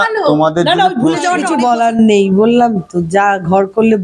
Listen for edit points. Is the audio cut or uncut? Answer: cut